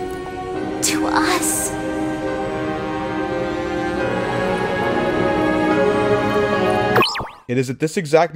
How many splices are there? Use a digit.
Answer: 1